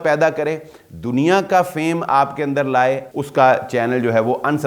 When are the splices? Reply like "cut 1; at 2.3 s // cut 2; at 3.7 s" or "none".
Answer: cut 1; at 3.1 s